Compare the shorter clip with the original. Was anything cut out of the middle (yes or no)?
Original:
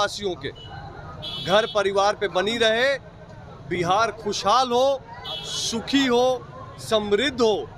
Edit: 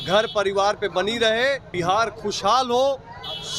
yes